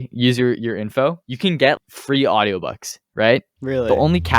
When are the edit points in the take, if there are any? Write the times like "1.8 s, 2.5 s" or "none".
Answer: 1.7 s